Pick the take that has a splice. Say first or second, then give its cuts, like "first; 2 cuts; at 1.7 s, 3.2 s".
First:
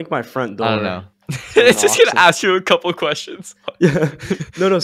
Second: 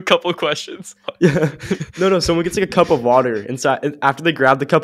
first; 1 cut; at 1.6 s